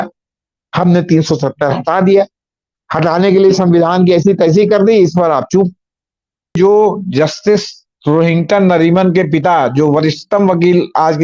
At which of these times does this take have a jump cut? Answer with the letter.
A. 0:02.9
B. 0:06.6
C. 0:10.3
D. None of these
B